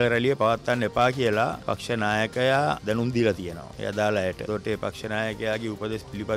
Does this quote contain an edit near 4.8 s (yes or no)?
no